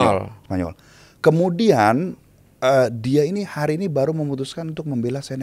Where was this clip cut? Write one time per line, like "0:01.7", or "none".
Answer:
none